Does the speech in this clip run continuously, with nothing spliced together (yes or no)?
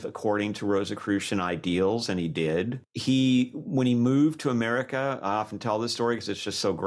no